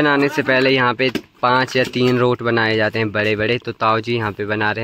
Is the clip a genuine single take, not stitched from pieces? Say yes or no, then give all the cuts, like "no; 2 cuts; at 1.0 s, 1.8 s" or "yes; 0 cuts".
yes; 0 cuts